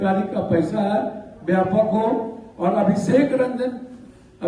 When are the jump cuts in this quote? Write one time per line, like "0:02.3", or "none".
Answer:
none

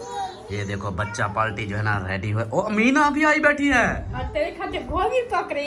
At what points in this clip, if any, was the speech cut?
none

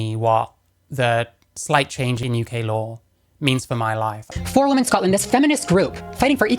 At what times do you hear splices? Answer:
0:04.2

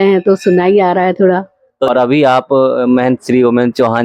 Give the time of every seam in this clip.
0:01.7

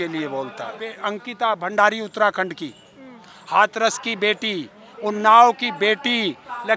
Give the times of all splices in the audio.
0:01.1

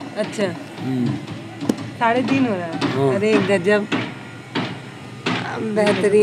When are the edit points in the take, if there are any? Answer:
none

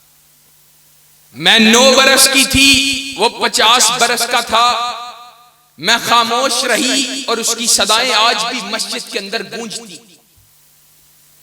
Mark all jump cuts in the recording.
0:10.2

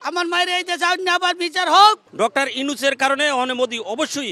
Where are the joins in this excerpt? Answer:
0:02.1

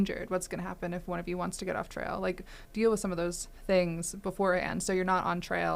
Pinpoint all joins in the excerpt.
0:02.6
0:03.5

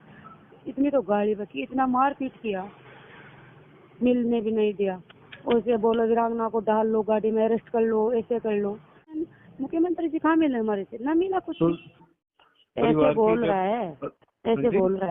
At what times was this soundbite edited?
0:09.1
0:12.2

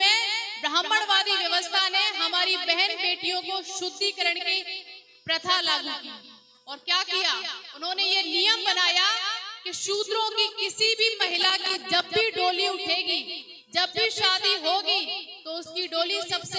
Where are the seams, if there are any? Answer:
none

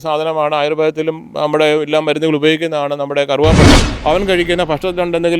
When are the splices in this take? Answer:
0:03.9

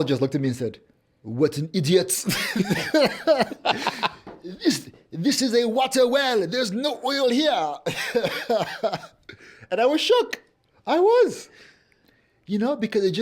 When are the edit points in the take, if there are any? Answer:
none

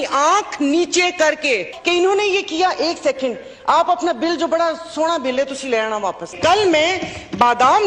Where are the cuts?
0:01.7
0:06.4

